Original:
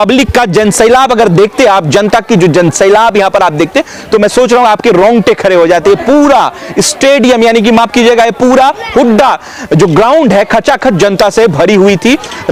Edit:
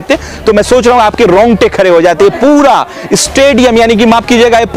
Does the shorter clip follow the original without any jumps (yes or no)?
yes